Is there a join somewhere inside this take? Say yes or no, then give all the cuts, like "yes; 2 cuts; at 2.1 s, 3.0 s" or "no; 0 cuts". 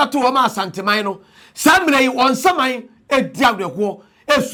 no; 0 cuts